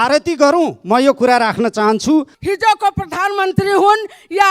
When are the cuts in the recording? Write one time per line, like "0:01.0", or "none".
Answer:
0:02.4